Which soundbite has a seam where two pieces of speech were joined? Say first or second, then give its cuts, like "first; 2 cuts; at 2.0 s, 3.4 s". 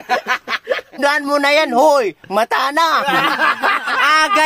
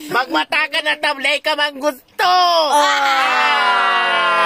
first; 1 cut; at 1.0 s